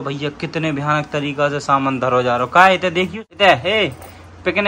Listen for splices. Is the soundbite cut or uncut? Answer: cut